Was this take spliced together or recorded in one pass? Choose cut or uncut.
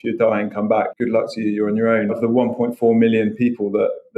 cut